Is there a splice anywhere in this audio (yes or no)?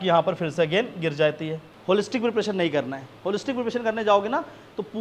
yes